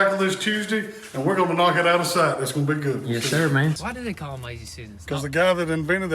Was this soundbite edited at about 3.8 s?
yes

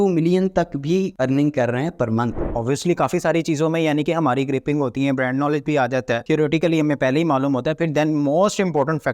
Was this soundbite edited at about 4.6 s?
no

